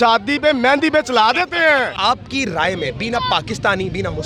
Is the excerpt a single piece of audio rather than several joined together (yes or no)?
no